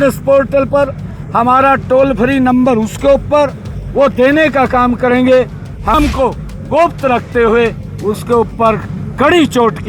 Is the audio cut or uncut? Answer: cut